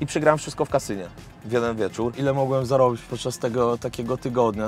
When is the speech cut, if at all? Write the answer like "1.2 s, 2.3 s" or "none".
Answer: 2.1 s